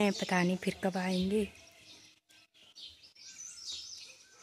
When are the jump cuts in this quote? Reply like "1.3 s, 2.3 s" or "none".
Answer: none